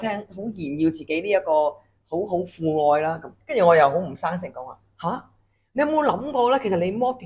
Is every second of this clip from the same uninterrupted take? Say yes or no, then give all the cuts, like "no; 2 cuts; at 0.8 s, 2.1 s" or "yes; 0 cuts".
yes; 0 cuts